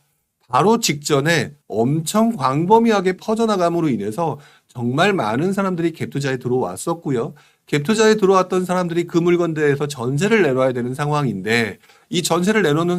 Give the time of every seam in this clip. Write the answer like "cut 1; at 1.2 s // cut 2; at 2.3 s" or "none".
cut 1; at 1.6 s // cut 2; at 3.2 s